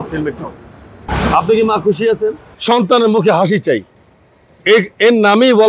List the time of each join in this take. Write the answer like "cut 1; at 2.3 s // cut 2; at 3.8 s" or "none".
cut 1; at 2.5 s